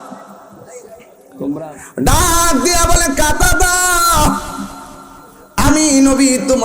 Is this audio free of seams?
no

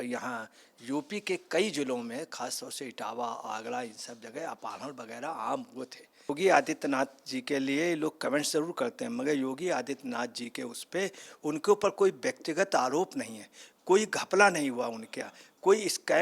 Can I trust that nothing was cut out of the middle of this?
no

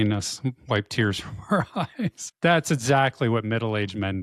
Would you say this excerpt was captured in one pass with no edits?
no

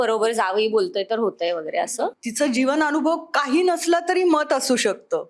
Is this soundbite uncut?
no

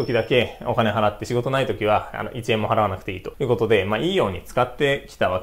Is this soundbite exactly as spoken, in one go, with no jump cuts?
yes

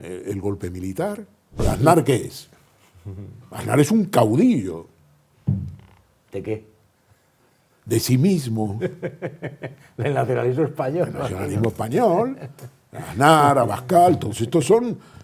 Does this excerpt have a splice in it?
yes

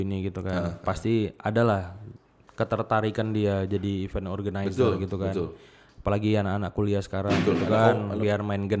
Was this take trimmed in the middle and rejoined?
no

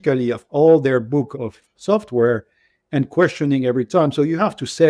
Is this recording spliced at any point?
yes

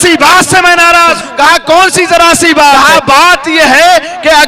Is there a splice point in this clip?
yes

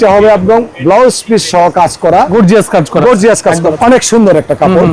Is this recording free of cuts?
no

